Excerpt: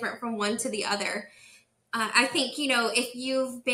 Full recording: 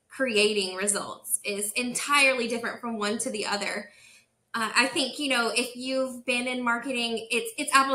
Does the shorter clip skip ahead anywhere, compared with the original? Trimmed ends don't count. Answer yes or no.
no